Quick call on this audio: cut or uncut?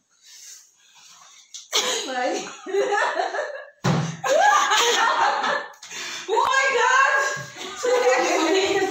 cut